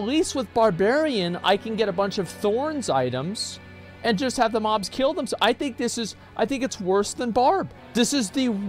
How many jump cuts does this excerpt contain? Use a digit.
1